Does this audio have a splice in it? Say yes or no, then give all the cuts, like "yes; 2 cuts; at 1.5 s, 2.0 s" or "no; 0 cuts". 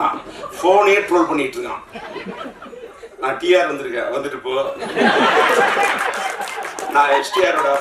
no; 0 cuts